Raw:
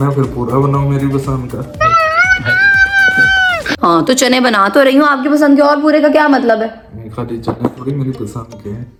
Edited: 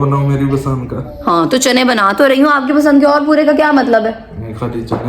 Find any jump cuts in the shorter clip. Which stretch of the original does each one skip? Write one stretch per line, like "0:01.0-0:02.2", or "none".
0:01.7-0:03.7